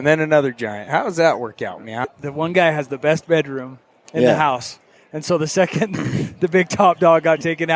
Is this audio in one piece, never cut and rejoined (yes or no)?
no